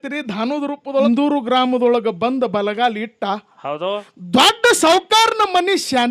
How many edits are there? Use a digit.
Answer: 1